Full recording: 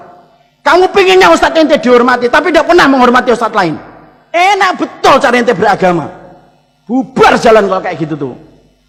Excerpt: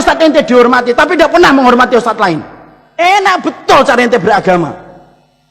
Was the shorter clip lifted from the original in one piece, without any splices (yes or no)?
yes